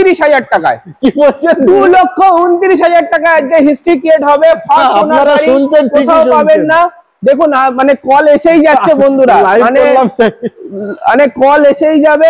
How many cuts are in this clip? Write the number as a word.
zero